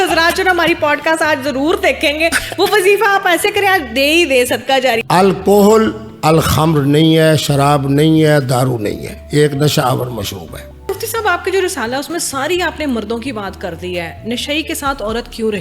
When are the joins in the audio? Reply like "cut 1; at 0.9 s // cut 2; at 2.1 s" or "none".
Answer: cut 1; at 5.0 s // cut 2; at 10.9 s